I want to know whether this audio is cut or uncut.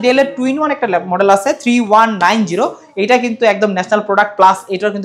uncut